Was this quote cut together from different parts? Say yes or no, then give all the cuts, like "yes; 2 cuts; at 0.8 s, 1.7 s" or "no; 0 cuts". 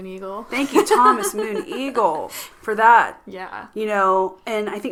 no; 0 cuts